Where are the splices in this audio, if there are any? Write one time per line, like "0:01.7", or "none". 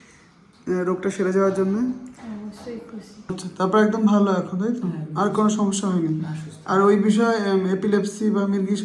0:03.3